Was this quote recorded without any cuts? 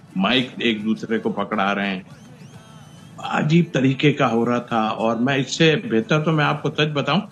yes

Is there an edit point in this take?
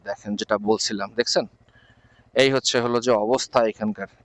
no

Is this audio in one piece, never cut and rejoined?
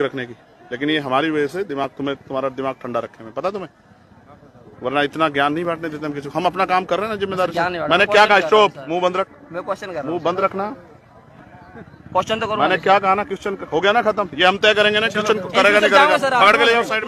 yes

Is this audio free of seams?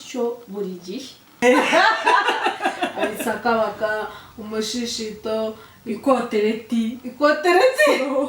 no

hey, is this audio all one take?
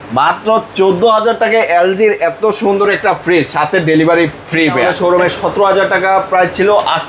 no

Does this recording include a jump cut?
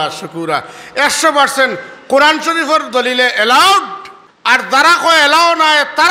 yes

